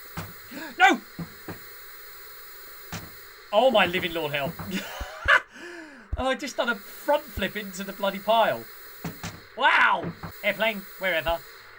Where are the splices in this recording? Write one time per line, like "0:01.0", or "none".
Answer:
0:10.2